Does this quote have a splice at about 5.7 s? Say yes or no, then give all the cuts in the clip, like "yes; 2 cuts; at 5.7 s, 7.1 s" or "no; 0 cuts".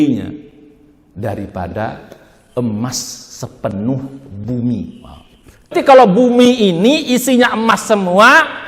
yes; 1 cut; at 5.7 s